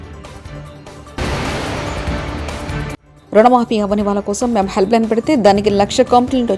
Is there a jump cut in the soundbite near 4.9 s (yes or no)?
no